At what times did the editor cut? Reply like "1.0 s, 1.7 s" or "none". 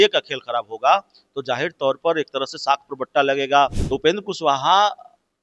3.8 s